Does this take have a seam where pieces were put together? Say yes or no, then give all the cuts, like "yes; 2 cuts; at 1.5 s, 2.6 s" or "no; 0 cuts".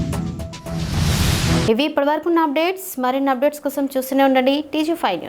no; 0 cuts